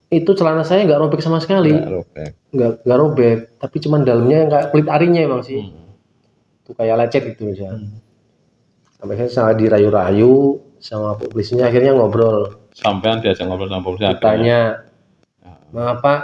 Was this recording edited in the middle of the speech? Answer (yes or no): no